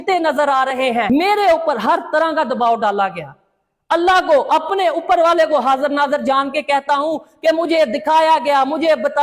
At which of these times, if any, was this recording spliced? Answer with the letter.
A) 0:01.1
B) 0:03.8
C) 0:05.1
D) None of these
A